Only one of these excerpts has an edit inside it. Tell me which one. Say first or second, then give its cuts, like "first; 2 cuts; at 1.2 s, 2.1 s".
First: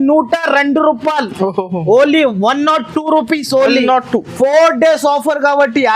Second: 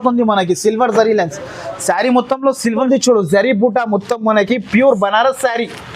second; 1 cut; at 2.8 s